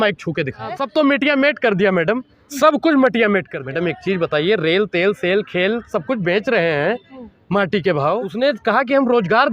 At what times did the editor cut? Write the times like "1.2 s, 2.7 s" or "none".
0.8 s, 3.6 s, 8.3 s

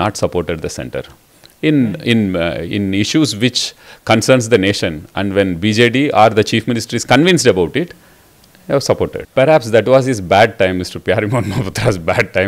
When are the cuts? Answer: 9.2 s

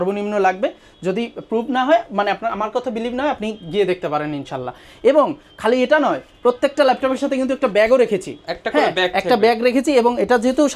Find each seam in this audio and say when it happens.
none

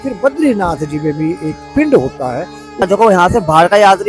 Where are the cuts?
2.8 s

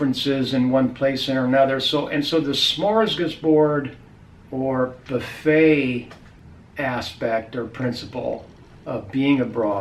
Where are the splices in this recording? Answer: none

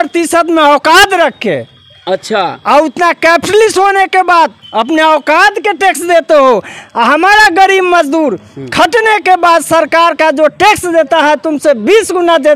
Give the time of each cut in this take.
none

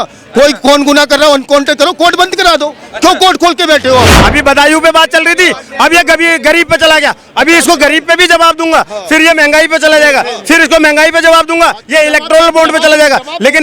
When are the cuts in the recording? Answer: 4.2 s

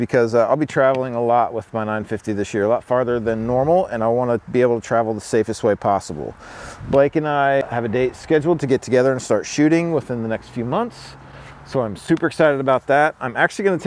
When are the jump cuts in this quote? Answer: 7.6 s

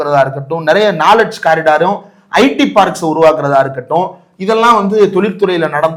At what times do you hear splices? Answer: none

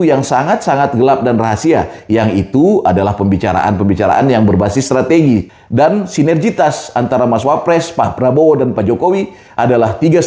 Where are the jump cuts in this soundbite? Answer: 5.6 s

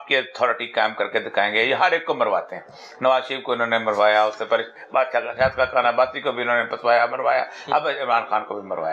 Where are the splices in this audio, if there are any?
none

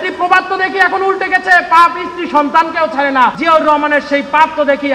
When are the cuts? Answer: 3.4 s

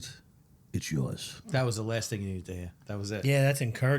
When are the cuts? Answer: 1.3 s

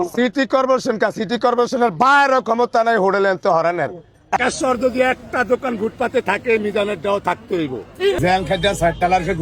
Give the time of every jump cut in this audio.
4.4 s, 8.2 s

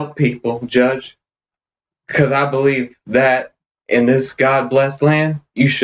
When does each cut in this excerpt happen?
none

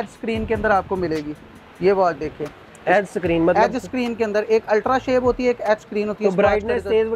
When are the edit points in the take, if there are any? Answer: none

